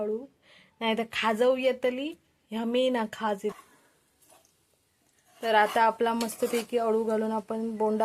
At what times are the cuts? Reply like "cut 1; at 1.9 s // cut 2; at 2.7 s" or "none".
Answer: cut 1; at 3.6 s

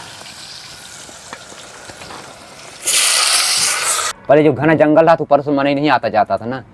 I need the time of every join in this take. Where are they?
cut 1; at 4.1 s

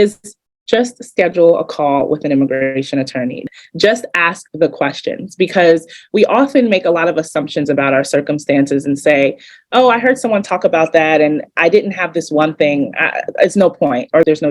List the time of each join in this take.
cut 1; at 3.4 s

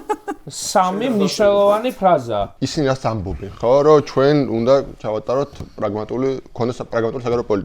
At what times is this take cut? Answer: cut 1; at 2.5 s

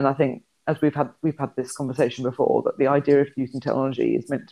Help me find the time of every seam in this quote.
none

